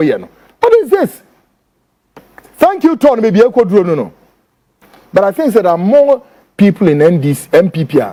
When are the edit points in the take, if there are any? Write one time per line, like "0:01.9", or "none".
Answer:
none